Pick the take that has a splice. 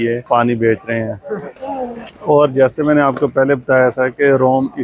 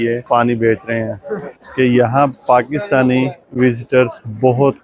second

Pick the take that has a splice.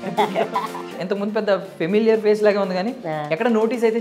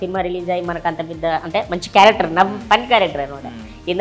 first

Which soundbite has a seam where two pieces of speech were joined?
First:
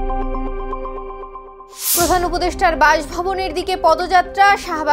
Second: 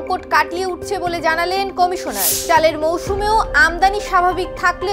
first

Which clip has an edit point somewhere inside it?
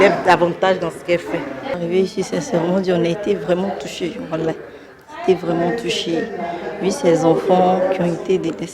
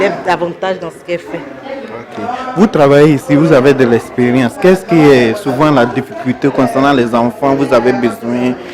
first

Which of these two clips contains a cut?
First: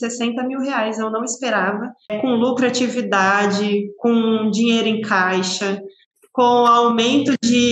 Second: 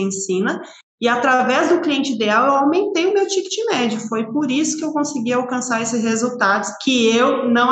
first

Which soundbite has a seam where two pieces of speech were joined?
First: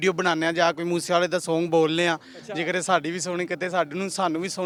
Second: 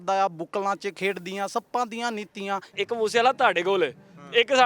second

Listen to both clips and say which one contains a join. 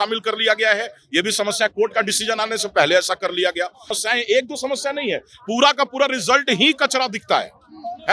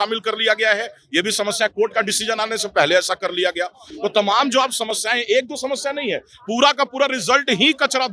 first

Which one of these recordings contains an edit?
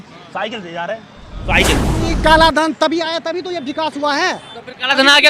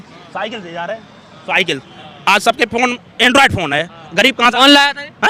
first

